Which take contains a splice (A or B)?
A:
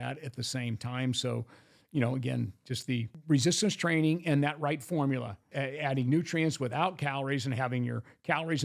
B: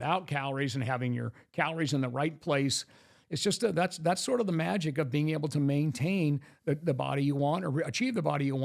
A